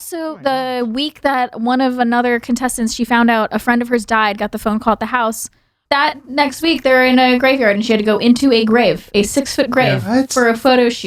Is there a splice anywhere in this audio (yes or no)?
yes